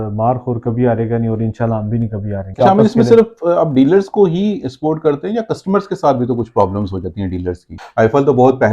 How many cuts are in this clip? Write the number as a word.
two